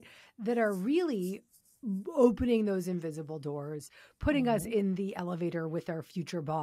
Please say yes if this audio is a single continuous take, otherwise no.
yes